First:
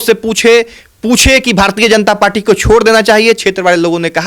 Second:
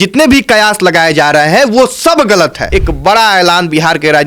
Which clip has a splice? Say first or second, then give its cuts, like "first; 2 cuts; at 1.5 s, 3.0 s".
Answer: second; 1 cut; at 2.6 s